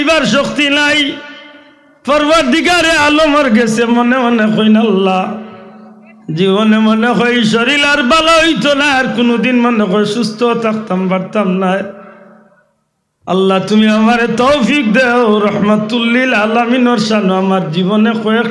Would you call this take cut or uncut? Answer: uncut